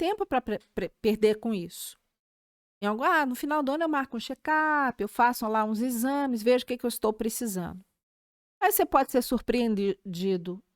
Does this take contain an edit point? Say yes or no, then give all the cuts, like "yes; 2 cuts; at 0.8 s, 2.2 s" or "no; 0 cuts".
no; 0 cuts